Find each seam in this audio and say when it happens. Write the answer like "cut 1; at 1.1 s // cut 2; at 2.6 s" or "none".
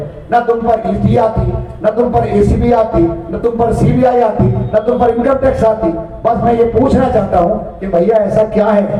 none